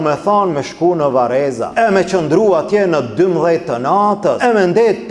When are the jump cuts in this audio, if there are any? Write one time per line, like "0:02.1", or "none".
0:01.6
0:04.4